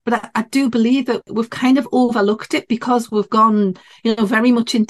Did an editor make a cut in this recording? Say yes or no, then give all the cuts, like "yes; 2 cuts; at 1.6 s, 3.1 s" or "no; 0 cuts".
yes; 1 cut; at 1.3 s